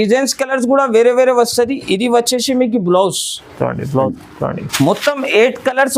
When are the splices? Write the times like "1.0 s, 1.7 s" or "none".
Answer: 4.2 s